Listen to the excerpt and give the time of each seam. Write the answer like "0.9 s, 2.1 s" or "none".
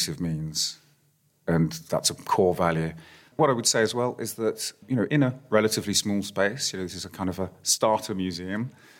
1.8 s, 3.4 s